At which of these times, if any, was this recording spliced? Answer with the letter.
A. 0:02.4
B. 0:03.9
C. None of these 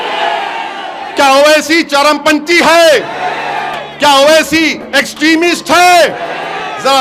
C